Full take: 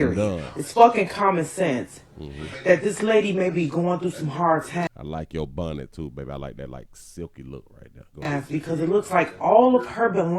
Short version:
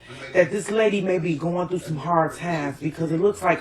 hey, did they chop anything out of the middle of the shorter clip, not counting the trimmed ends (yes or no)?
yes